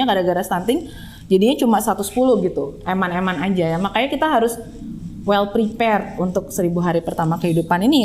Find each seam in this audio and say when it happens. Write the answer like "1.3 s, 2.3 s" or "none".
none